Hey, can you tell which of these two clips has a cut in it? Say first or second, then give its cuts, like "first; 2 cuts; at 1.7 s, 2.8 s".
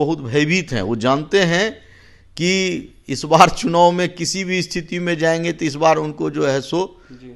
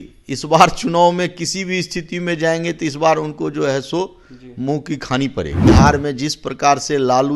second; 1 cut; at 5.7 s